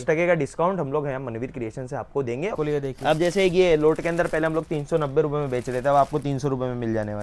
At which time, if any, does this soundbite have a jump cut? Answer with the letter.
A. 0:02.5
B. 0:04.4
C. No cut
A